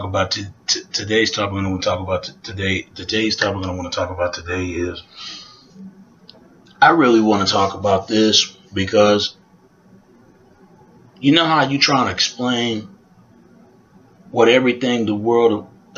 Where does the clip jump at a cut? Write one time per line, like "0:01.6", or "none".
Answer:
0:06.9